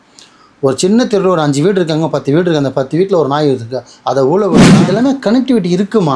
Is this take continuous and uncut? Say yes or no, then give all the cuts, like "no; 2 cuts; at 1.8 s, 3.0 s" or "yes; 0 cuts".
no; 1 cut; at 4.6 s